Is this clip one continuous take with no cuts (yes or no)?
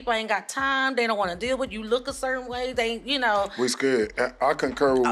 yes